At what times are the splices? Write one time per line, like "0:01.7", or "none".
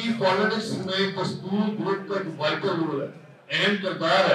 none